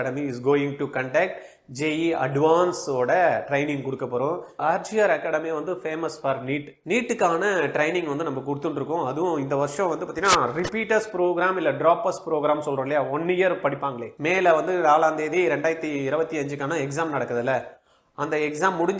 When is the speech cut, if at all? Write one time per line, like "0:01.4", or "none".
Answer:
0:04.6